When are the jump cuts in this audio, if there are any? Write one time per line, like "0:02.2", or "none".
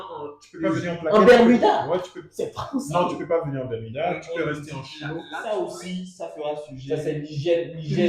0:02.2
0:05.3